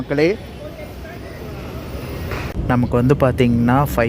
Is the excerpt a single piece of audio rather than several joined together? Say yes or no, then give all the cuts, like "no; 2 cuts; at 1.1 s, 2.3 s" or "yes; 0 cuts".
no; 1 cut; at 2.5 s